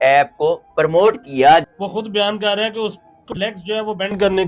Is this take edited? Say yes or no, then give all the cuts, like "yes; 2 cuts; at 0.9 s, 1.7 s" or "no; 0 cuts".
yes; 1 cut; at 1.6 s